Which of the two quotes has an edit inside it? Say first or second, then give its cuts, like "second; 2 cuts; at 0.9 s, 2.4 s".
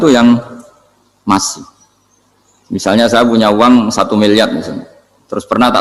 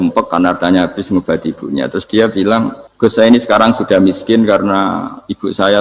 second; 1 cut; at 2.8 s